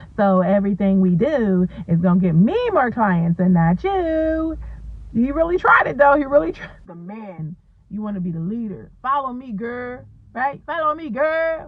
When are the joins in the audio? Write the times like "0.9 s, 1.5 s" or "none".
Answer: 6.7 s